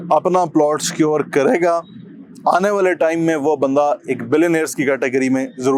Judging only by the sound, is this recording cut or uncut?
uncut